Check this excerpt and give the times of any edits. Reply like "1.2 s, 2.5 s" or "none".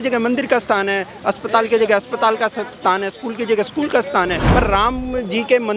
4.4 s